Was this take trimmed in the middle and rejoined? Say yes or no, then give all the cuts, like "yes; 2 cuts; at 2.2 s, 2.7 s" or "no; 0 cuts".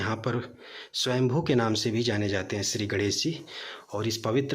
no; 0 cuts